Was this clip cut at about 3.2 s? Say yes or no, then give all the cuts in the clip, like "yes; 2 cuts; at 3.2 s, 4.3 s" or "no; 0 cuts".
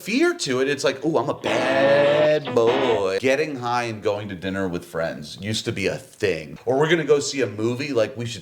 yes; 2 cuts; at 3.2 s, 6.5 s